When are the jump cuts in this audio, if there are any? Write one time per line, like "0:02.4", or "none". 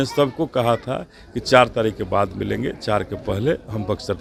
none